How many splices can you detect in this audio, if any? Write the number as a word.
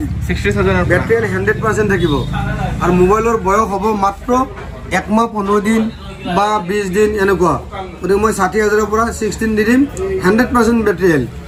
zero